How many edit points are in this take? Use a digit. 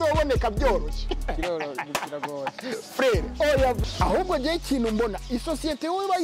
1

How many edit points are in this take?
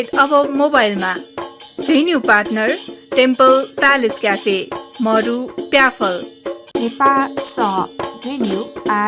2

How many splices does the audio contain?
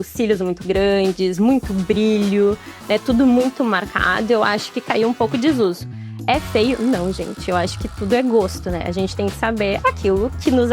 0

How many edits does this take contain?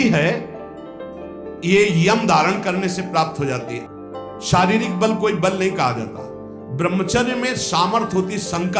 1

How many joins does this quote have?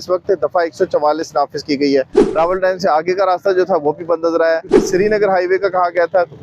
2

